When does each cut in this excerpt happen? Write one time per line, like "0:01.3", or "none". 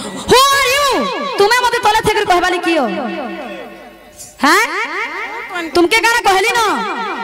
none